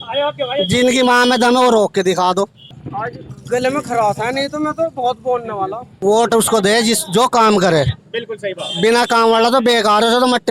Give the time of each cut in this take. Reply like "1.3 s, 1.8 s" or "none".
2.7 s, 5.9 s